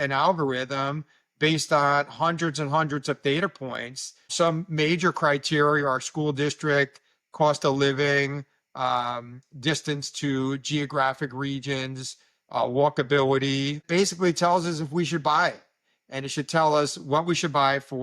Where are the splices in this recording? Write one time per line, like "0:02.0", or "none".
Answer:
0:04.3
0:13.8